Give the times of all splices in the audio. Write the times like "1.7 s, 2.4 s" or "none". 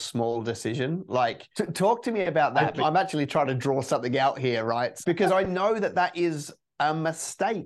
1.4 s, 2.8 s, 5.0 s